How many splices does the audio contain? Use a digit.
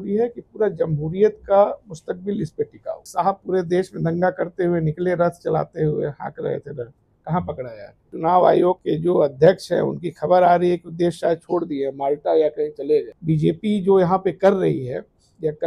4